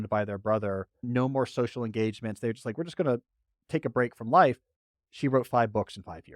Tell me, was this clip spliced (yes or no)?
yes